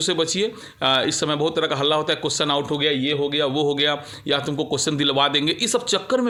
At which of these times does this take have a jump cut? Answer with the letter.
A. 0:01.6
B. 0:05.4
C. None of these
C